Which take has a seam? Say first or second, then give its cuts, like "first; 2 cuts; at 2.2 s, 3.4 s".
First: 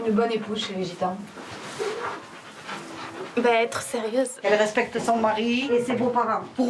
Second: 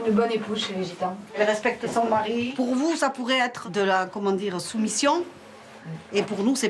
second; 3 cuts; at 1.3 s, 2.5 s, 3.6 s